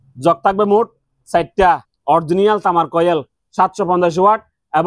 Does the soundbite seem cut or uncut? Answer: cut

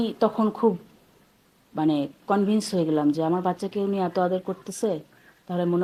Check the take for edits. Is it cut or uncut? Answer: uncut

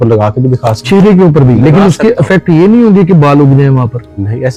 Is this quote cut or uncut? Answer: uncut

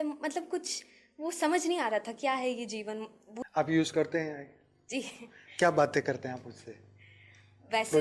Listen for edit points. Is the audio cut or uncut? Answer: cut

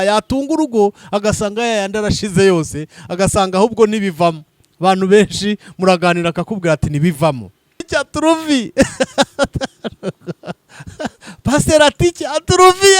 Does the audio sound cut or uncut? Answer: cut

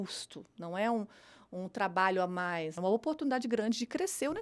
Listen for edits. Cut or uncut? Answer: cut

